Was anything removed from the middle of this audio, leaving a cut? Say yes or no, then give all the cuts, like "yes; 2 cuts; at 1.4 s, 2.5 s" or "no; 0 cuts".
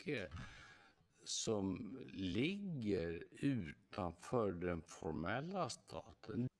no; 0 cuts